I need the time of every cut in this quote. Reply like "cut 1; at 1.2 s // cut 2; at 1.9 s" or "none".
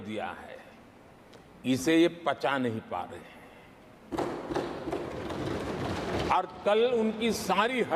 none